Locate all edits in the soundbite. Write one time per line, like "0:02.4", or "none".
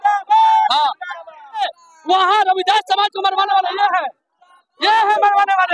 0:01.6